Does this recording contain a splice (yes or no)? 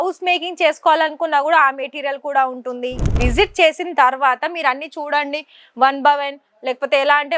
yes